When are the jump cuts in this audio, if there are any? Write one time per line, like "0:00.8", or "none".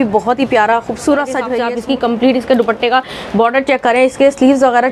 0:01.6